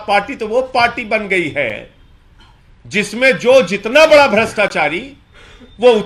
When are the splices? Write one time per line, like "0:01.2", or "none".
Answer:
none

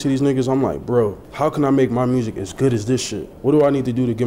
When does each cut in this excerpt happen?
0:01.2
0:03.2

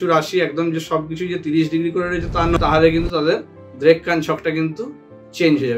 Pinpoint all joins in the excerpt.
0:02.6

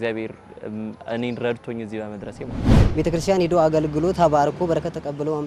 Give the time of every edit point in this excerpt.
0:02.7

